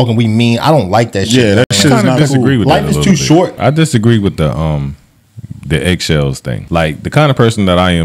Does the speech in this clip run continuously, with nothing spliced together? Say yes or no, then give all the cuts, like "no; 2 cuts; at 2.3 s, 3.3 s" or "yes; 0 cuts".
no; 2 cuts; at 3.5 s, 6.6 s